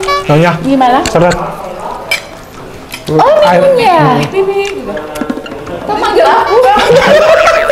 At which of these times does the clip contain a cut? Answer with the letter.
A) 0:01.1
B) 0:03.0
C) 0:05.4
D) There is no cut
D